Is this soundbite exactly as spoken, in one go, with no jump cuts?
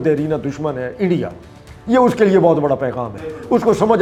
yes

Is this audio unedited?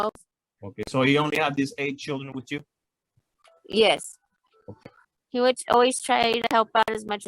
no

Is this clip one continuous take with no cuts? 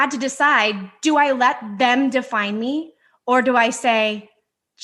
yes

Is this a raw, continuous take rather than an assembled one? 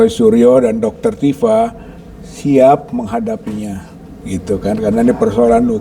yes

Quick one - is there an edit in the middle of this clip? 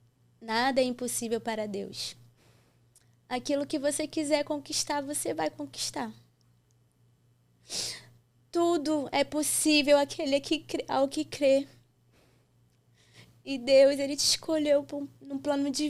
no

